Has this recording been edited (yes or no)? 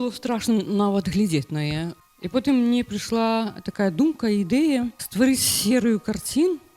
yes